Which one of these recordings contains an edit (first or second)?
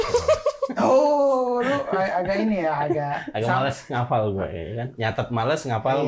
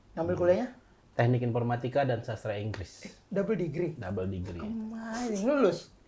second